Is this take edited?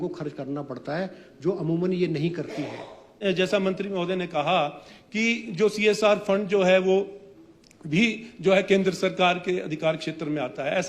yes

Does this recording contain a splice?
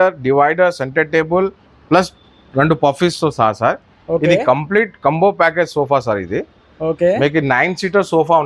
no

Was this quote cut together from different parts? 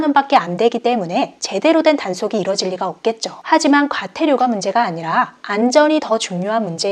no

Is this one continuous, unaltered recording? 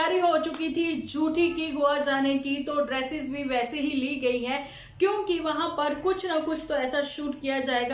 yes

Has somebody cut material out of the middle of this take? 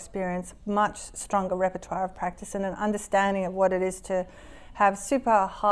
no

